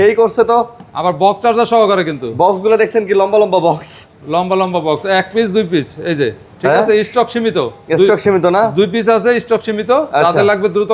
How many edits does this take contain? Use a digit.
0